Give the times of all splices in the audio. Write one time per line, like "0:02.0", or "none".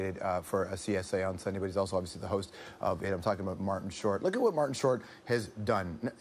none